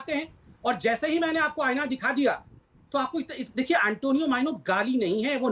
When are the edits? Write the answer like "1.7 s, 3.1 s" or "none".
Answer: none